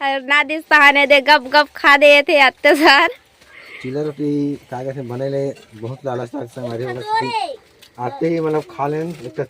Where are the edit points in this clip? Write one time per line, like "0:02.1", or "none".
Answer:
none